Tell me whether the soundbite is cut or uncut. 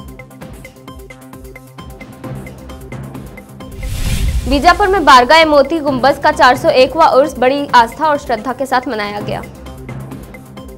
uncut